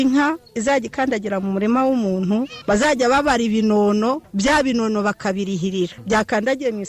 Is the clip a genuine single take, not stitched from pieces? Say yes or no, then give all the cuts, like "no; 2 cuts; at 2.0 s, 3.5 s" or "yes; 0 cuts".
no; 3 cuts; at 2.5 s, 4.3 s, 6.0 s